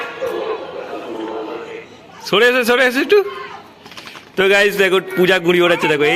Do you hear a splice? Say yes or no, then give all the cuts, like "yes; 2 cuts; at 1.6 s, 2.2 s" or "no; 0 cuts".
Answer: no; 0 cuts